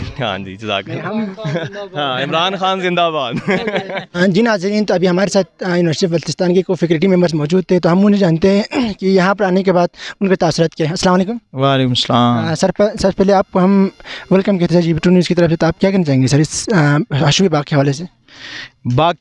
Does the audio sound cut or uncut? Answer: uncut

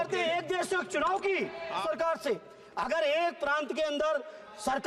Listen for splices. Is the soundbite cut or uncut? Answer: cut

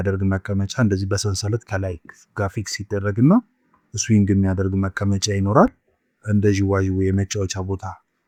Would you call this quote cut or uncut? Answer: uncut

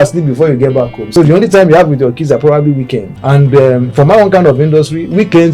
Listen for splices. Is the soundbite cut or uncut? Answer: cut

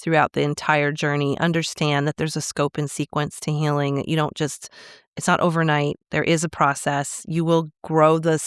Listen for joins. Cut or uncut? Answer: uncut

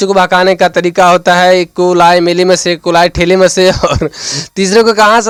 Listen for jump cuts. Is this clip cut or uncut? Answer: uncut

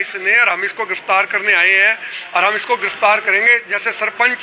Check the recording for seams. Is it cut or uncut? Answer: uncut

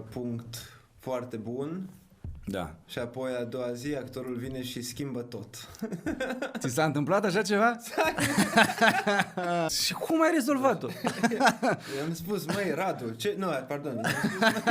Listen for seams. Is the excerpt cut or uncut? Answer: cut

